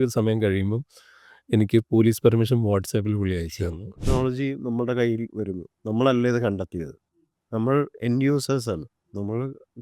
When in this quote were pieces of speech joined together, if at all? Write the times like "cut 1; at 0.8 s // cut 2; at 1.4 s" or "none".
cut 1; at 3.9 s